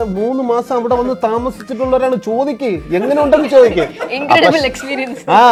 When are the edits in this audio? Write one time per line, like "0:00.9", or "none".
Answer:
none